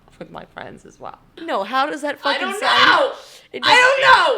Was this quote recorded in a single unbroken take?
no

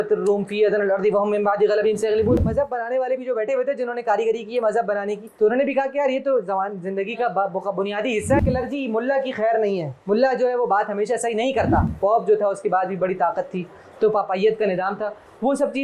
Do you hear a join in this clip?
yes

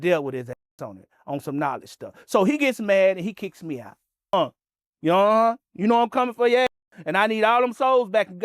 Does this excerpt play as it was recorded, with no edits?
no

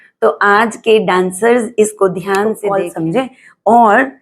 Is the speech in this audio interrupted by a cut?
yes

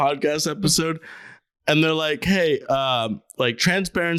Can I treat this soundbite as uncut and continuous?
yes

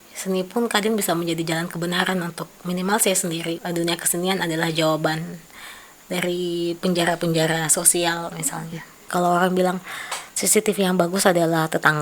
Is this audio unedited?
no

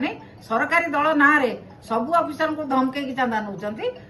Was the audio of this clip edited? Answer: no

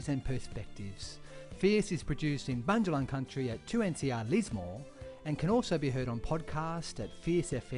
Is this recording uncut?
yes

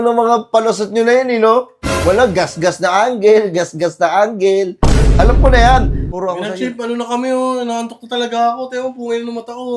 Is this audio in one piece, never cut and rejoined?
no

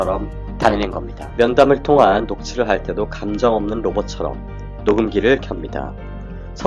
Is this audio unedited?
no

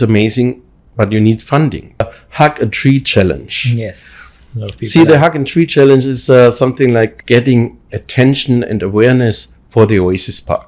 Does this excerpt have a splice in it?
yes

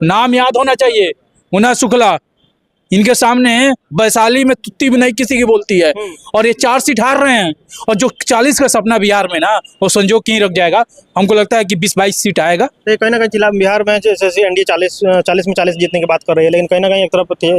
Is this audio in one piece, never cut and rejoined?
yes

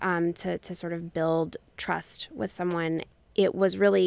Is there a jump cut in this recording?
yes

